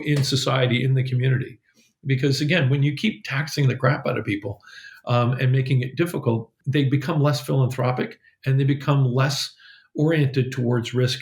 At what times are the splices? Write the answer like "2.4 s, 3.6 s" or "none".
6.6 s